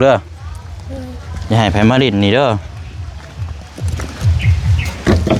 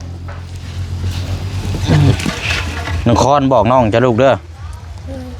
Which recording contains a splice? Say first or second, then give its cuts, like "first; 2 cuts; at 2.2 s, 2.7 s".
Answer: second; 1 cut; at 1.8 s